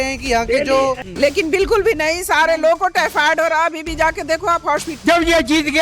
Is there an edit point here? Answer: yes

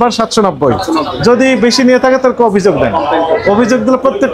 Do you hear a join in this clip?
no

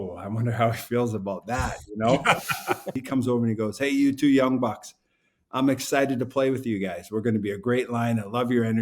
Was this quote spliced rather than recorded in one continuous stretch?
yes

